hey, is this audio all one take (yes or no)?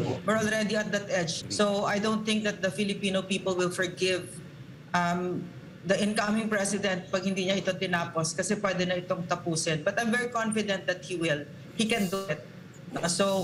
no